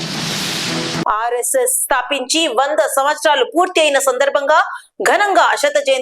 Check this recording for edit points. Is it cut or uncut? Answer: uncut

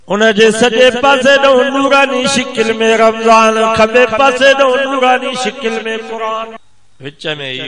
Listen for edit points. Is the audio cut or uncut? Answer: cut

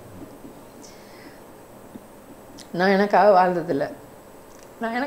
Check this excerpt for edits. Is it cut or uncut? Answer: uncut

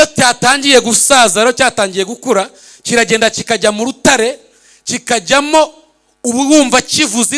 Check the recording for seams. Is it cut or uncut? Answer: uncut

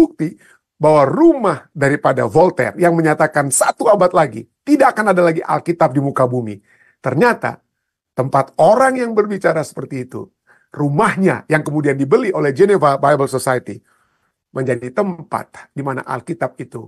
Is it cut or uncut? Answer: uncut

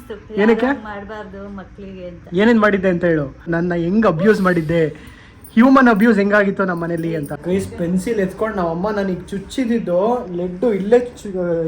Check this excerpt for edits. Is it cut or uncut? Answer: cut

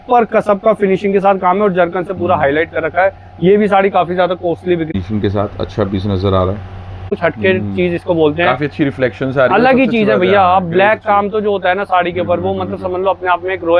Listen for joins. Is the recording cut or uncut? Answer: cut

